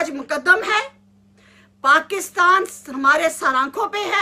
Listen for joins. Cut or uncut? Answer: uncut